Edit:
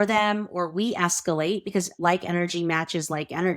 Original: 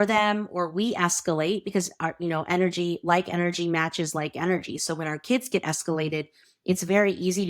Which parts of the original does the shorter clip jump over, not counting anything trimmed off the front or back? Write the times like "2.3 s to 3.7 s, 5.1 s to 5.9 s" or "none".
1.9 s to 3.0 s

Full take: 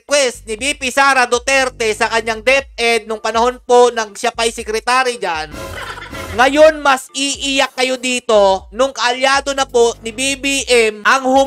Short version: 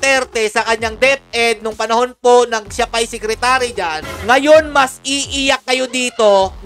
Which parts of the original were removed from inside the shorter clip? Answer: 5.5 s to 6.2 s

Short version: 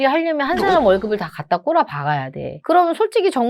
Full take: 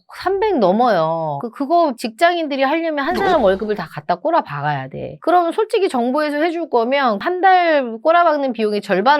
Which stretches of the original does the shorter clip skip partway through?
none

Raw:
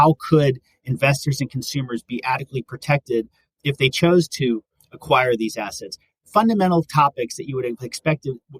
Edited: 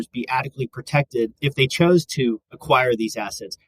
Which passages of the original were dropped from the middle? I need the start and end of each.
3.3 s to 3.6 s, 4.7 s to 4.9 s

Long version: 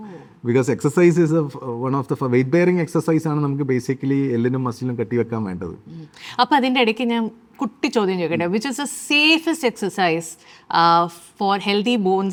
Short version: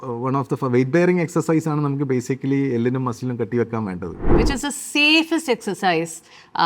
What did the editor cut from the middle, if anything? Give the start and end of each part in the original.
6.0 s to 8.6 s

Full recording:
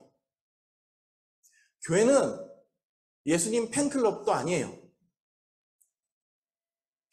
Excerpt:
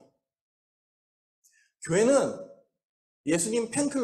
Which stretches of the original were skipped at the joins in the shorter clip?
none

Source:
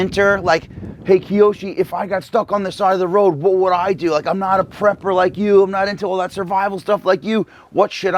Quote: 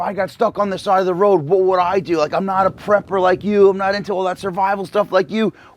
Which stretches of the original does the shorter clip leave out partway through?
none

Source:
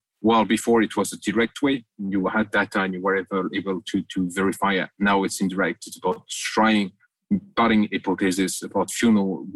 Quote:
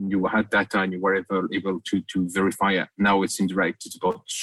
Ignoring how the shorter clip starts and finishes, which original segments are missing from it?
none

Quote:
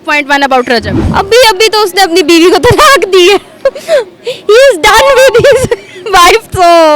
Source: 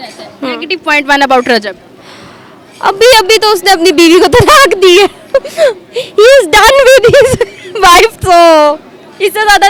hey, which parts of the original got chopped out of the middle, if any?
1.8 s to 2.7 s

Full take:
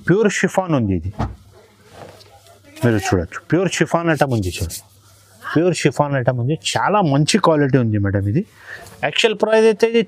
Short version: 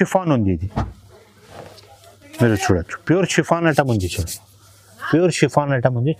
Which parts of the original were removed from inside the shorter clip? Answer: none

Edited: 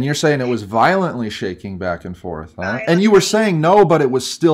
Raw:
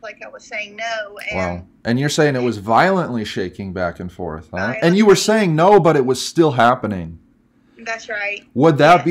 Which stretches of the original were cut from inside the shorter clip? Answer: none

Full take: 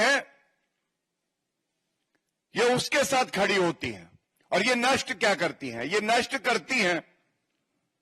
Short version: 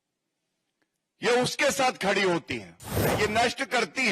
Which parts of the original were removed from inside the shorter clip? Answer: 4.3 s to 5.7 s

